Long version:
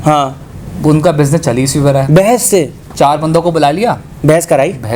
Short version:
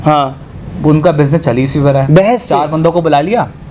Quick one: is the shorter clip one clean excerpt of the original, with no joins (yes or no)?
no